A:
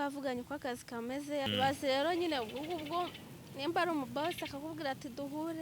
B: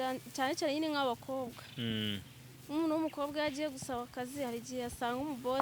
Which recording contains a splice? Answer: A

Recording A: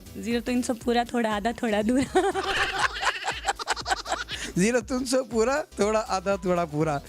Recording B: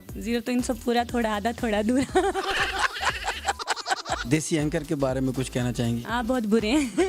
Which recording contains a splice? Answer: B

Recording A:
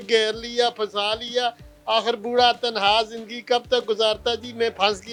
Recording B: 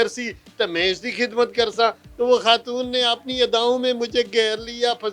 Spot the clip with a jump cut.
B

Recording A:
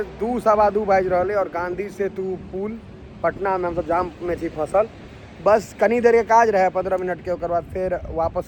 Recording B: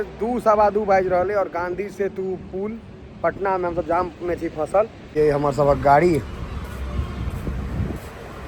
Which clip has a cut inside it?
B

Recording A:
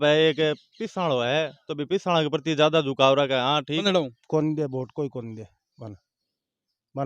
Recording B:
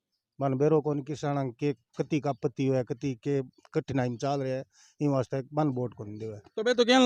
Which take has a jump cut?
A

